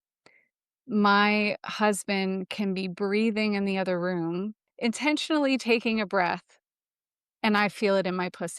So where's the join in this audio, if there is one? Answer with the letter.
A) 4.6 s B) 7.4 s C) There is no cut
A